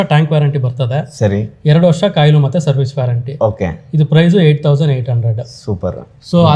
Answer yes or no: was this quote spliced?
no